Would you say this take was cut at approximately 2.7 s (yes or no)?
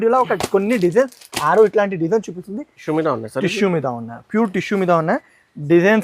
yes